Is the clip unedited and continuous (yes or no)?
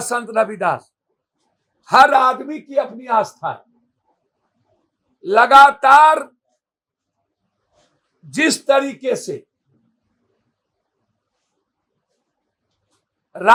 yes